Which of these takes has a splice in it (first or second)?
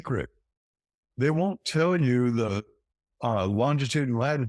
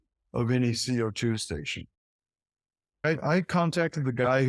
second